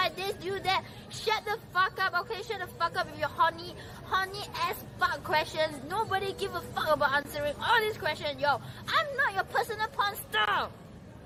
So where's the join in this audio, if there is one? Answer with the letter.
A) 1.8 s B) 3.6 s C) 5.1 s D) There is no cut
D